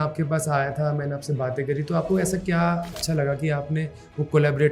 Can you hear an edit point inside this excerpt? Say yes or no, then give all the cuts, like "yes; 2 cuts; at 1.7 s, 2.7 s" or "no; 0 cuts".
yes; 1 cut; at 3.0 s